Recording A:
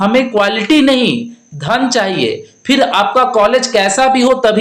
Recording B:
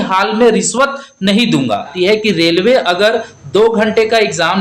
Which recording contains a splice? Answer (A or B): B